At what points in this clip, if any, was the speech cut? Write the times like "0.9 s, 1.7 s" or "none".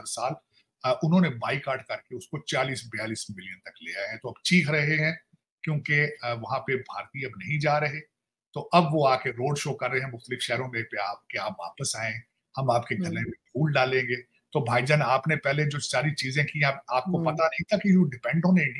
none